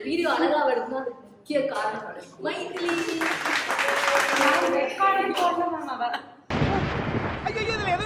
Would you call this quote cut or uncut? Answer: uncut